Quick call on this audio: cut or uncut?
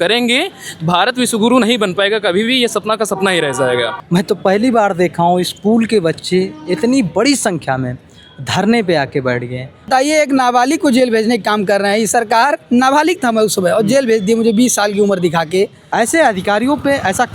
cut